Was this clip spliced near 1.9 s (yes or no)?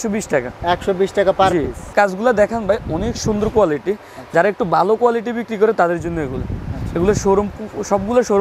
yes